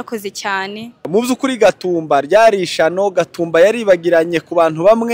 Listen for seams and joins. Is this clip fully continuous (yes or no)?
no